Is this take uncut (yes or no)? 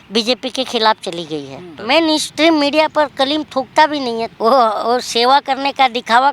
no